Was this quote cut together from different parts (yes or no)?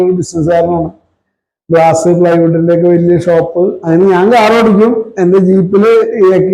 yes